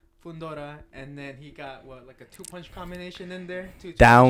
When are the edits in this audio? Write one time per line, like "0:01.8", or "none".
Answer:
none